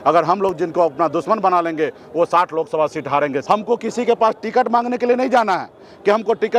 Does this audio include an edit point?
yes; 1 cut; at 3.4 s

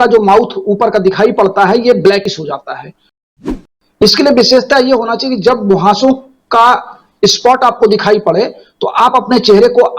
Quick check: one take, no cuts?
no; 1 cut; at 3.2 s

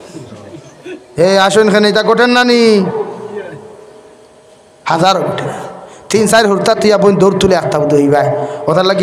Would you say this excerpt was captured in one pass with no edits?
yes; 0 cuts

